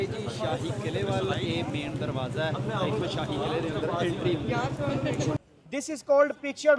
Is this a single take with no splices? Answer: no; 1 cut; at 5.4 s

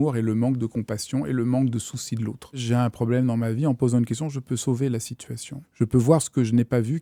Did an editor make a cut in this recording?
yes; 2 cuts; at 2.6 s, 5.6 s

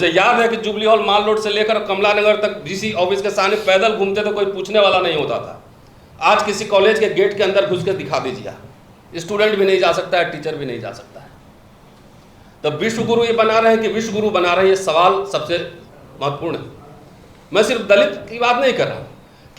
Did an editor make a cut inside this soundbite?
no; 0 cuts

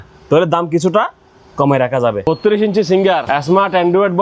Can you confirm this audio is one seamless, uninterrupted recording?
no; 2 cuts; at 2.3 s, 3.2 s

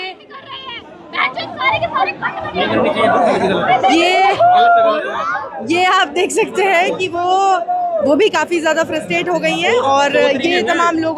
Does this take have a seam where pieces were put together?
no; 0 cuts

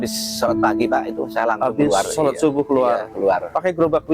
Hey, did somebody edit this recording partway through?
no; 0 cuts

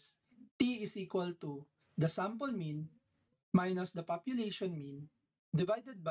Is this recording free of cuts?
yes; 0 cuts

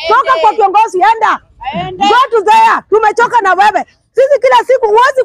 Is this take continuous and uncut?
yes; 0 cuts

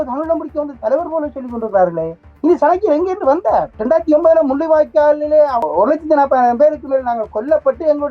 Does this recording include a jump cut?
yes; 2 cuts; at 3.7 s, 5.6 s

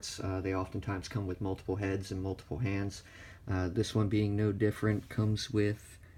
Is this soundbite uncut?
yes; 0 cuts

